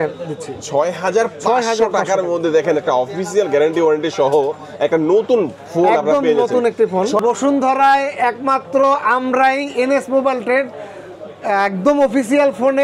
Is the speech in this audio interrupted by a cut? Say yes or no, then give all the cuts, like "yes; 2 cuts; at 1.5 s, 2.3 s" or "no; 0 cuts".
yes; 1 cut; at 7.2 s